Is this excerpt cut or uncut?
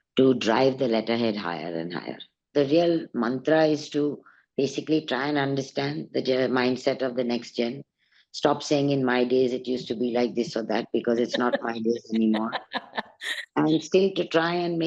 cut